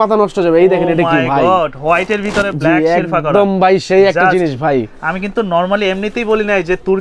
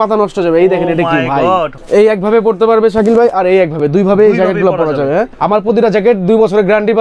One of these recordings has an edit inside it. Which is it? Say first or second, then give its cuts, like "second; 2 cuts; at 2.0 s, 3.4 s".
second; 2 cuts; at 1.7 s, 5.3 s